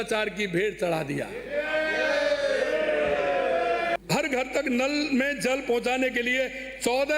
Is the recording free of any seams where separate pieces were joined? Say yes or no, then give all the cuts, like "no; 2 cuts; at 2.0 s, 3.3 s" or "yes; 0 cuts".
no; 1 cut; at 4.0 s